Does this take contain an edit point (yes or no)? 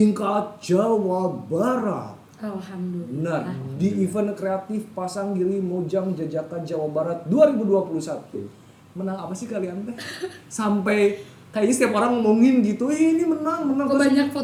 no